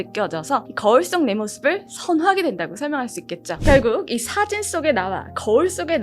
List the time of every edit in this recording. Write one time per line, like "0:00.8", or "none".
0:03.4